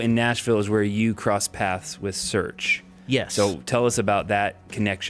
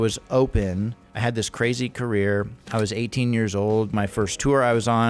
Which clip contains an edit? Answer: second; 3 cuts; at 1.0 s, 2.6 s, 3.9 s

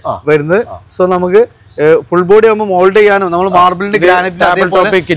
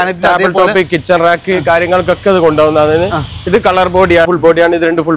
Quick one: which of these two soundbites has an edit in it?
second; 1 cut; at 4.3 s

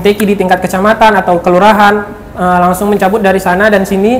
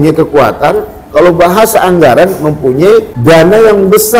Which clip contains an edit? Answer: second; 1 cut; at 3.1 s

